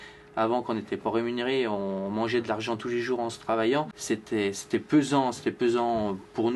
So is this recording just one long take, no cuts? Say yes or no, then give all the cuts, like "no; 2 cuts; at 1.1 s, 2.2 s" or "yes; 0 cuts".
no; 1 cut; at 4.0 s